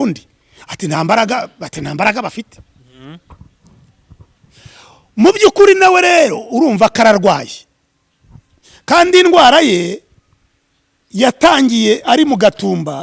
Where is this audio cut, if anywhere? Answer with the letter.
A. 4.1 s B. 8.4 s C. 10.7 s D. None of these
D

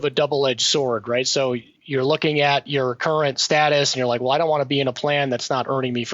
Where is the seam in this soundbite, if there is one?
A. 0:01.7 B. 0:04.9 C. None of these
A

